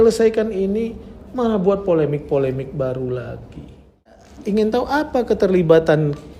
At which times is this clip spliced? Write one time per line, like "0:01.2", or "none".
0:04.3